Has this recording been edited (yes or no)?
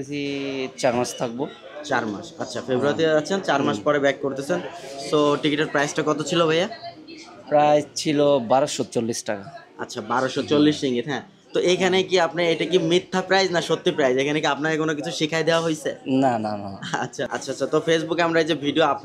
yes